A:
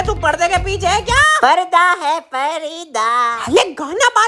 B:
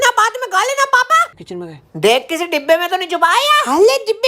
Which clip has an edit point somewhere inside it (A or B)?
B